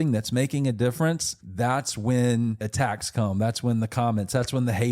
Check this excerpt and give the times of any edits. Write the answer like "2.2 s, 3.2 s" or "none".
1.4 s, 2.6 s

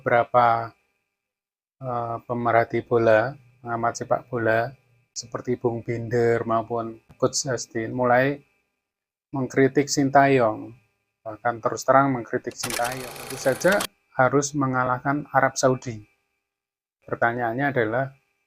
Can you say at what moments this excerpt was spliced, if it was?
12.7 s

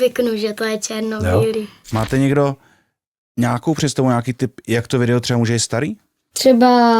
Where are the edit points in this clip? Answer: 1.8 s

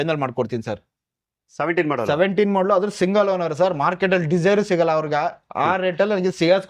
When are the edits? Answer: none

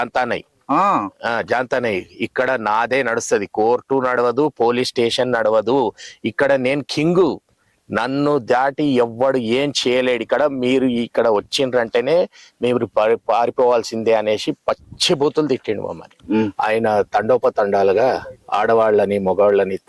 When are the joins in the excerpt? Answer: 16.2 s

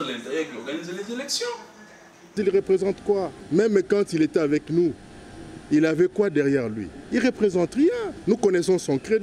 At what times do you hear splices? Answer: 2.3 s

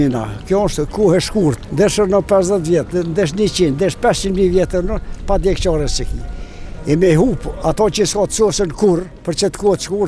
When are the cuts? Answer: 1.6 s, 9.2 s

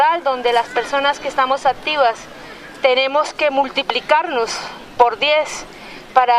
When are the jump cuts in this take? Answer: 4.0 s

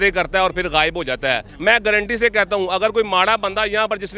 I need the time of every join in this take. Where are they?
1.5 s

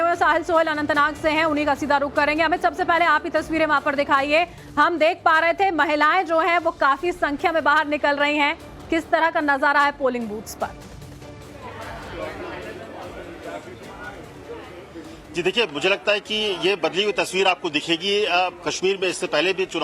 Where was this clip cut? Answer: 14.4 s

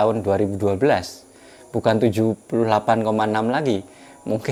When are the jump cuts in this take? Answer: none

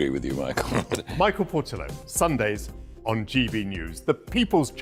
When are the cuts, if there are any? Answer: none

